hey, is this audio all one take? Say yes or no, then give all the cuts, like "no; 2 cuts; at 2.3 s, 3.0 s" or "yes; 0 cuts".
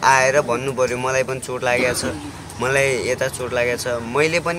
yes; 0 cuts